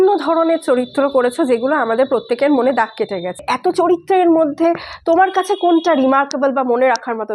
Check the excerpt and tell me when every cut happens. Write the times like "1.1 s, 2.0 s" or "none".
none